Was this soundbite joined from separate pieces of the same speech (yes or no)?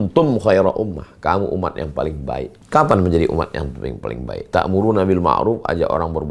yes